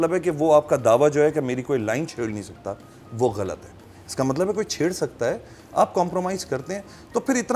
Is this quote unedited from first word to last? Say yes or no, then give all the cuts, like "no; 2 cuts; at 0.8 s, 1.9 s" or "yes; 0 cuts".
yes; 0 cuts